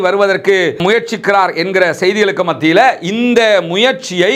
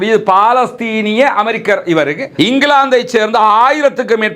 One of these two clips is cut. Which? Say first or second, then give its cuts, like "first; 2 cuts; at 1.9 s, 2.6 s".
second; 1 cut; at 2.2 s